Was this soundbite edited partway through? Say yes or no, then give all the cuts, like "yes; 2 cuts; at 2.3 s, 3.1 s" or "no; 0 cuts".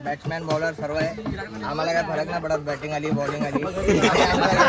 no; 0 cuts